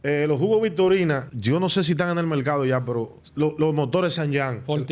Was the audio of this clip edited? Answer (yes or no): yes